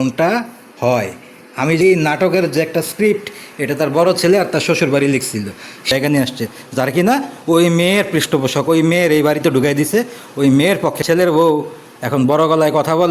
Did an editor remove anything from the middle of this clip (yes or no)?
yes